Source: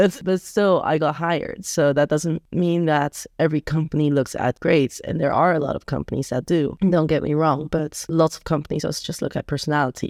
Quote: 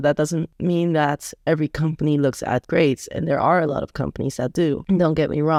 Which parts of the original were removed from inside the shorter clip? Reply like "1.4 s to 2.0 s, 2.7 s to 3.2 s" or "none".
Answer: none